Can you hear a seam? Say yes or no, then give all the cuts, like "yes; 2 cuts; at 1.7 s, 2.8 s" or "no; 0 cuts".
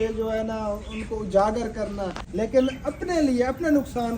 yes; 1 cut; at 2.2 s